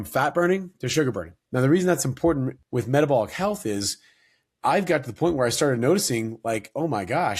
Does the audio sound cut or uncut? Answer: cut